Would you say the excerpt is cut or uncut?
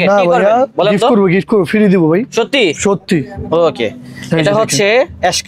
uncut